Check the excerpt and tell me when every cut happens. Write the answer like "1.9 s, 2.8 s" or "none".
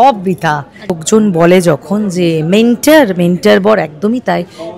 1.0 s